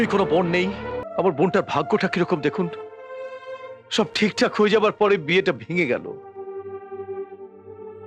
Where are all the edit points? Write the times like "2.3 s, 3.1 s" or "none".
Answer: 1.0 s